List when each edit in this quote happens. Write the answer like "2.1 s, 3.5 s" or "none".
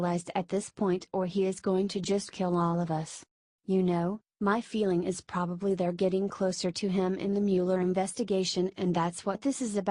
2.9 s